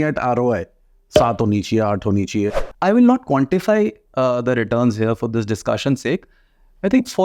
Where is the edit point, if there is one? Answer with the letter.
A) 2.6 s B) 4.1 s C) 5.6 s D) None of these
A